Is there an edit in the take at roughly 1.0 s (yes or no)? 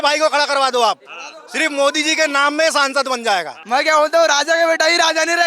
no